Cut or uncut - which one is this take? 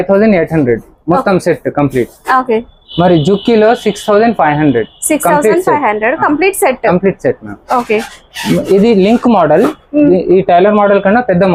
uncut